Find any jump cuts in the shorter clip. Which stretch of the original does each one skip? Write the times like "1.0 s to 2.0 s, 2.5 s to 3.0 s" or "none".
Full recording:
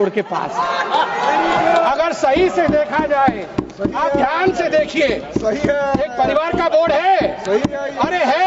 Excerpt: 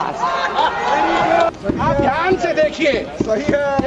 1.8 s to 3.6 s